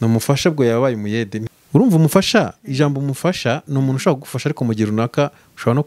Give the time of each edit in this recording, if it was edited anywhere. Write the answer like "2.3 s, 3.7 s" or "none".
1.4 s